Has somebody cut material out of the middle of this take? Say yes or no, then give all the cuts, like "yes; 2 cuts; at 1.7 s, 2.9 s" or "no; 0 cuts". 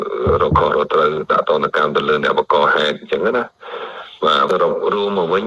yes; 1 cut; at 4.5 s